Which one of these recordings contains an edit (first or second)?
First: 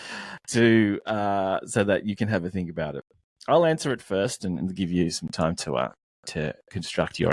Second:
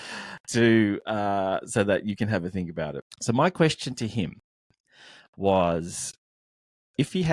second